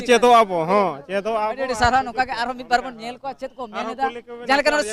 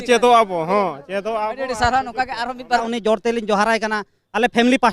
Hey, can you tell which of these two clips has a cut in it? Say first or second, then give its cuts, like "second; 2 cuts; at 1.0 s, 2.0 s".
second; 1 cut; at 2.8 s